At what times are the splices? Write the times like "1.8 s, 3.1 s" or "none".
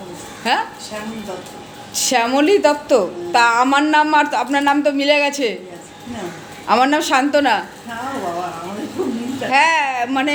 none

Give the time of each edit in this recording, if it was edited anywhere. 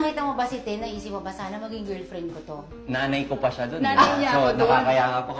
2.6 s

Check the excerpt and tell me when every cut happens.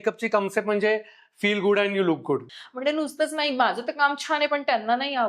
2.4 s

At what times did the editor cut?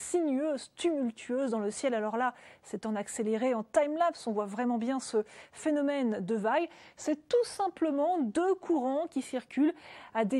5.8 s

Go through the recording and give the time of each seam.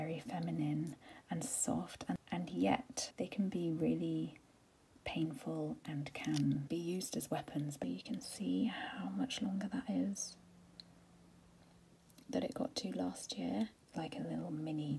2.2 s, 3.0 s, 6.6 s, 7.8 s, 13.8 s

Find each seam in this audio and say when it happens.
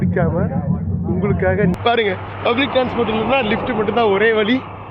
1.8 s

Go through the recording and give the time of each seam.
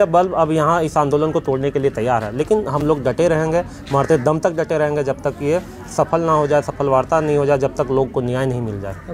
none

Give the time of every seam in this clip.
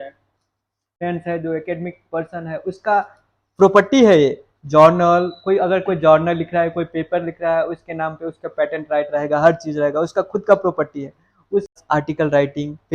1.0 s, 11.7 s

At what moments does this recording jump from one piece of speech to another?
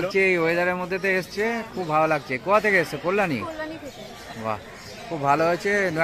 none

